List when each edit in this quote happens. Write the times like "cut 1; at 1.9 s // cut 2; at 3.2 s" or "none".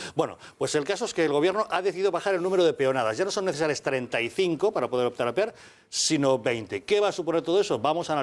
cut 1; at 3.4 s